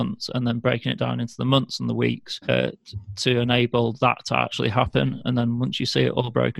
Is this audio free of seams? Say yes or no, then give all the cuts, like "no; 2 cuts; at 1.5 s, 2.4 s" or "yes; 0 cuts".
no; 1 cut; at 2.4 s